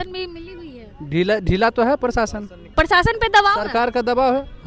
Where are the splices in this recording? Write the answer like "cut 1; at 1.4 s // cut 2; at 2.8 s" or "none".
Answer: cut 1; at 2.7 s